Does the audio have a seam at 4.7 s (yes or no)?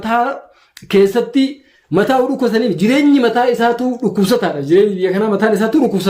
no